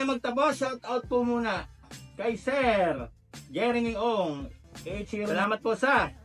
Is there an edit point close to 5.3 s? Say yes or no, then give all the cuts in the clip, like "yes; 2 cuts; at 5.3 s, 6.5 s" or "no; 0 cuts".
yes; 1 cut; at 5.3 s